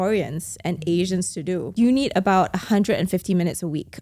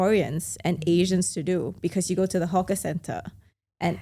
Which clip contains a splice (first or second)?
first